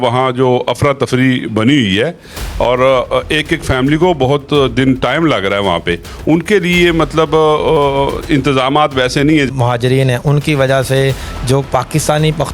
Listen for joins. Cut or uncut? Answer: cut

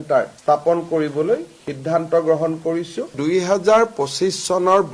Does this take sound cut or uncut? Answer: cut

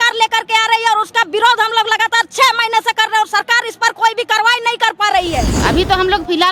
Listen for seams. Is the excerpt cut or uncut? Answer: cut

